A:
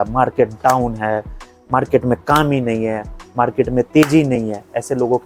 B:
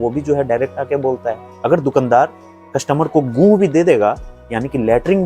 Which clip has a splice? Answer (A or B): B